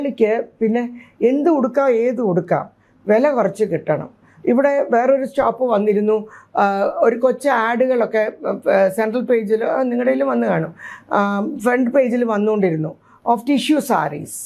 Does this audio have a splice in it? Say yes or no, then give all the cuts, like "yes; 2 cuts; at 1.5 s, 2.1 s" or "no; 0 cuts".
no; 0 cuts